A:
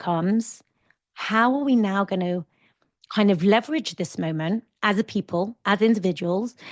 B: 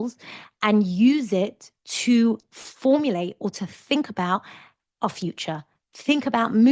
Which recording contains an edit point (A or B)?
A